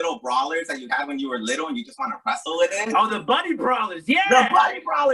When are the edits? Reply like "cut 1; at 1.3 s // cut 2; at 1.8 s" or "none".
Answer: none